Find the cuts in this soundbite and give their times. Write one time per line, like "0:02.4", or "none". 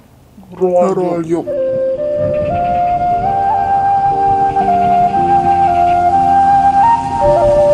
none